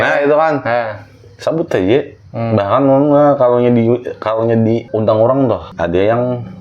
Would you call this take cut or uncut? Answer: cut